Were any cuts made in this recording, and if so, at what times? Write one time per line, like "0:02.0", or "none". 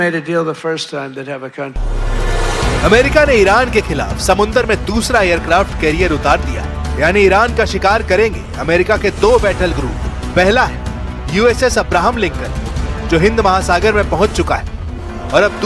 0:07.3